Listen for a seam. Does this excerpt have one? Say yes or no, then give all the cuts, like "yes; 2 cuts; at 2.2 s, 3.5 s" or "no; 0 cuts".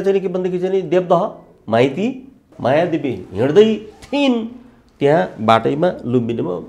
yes; 1 cut; at 2.5 s